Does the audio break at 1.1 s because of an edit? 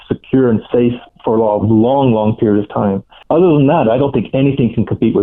yes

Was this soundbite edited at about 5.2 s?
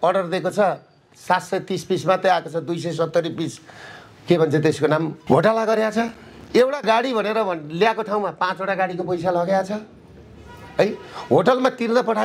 yes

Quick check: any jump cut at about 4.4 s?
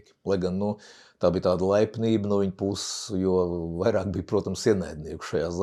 no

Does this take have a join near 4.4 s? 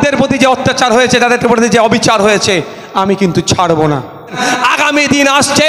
yes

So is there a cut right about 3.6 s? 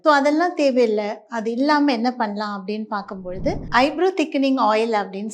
yes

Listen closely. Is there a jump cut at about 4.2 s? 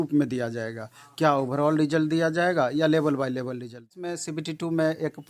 yes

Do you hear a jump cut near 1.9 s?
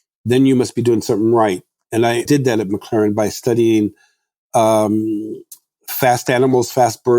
yes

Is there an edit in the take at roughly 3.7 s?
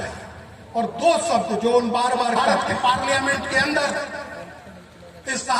no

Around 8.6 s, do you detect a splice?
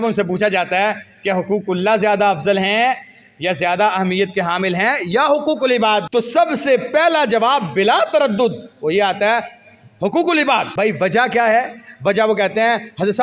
no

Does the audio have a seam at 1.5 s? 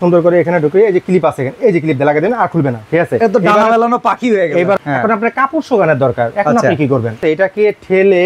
no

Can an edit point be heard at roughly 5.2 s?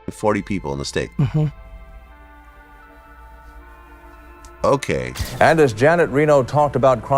yes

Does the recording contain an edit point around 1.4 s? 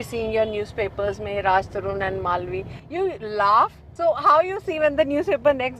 no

